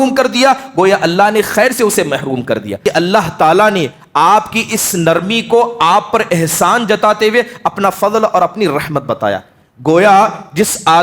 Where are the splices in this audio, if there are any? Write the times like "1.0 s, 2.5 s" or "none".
2.7 s